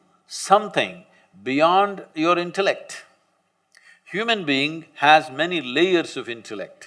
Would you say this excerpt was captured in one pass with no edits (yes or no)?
yes